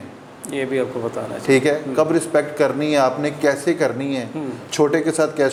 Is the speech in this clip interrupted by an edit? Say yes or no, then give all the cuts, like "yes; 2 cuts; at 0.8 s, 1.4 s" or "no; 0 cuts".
no; 0 cuts